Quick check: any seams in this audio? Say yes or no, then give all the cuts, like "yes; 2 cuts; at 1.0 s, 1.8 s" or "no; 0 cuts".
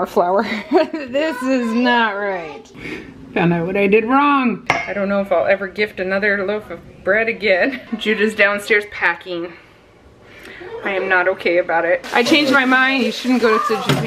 yes; 4 cuts; at 2.7 s, 4.7 s, 7.8 s, 12.1 s